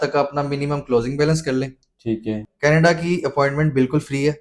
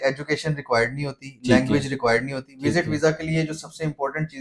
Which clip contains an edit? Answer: first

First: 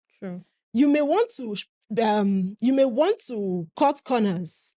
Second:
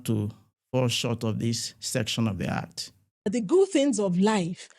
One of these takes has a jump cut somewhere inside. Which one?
second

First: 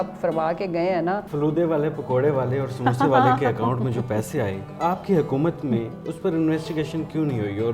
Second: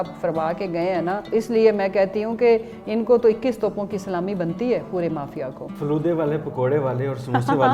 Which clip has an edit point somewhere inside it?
first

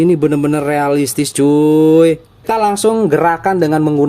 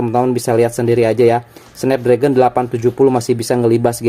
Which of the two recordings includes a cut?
first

